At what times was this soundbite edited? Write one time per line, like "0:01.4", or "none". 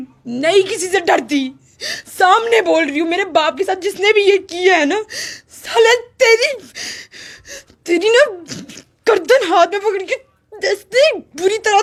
none